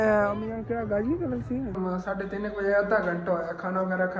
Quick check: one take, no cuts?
no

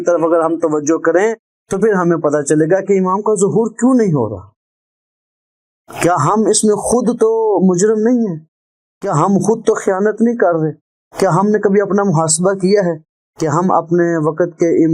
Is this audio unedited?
yes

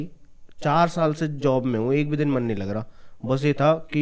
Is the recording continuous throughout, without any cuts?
yes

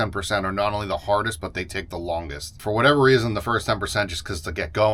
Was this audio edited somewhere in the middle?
yes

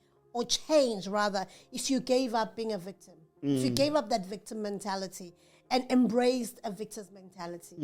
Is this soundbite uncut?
yes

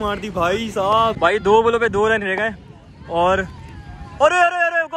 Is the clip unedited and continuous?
no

